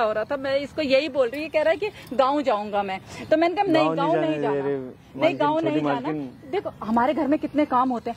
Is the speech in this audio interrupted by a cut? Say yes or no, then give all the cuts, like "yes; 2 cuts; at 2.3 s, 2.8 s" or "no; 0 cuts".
no; 0 cuts